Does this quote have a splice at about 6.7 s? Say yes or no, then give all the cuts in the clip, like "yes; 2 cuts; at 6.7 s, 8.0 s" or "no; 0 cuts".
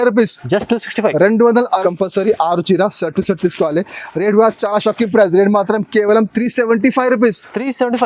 no; 1 cut; at 1.8 s